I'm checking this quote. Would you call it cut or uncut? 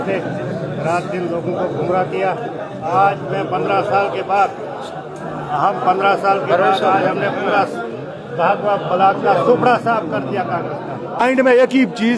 cut